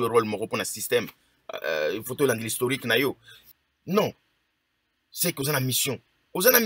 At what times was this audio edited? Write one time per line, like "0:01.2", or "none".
0:03.3